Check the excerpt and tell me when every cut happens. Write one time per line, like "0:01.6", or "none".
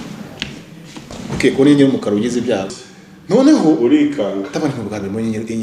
0:02.7

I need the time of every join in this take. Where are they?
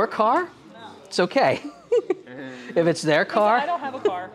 none

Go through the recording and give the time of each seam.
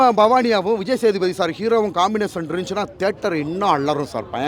none

